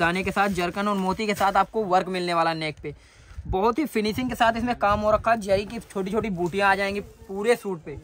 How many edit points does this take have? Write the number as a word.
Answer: zero